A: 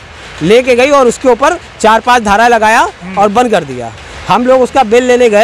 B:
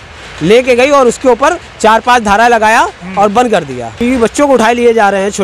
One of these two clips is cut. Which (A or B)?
B